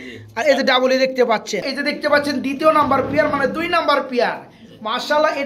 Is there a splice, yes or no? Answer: yes